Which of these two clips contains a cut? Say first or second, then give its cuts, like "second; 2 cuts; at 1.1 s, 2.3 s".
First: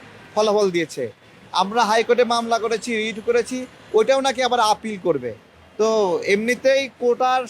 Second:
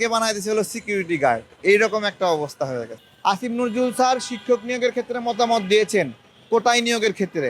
second; 1 cut; at 3.0 s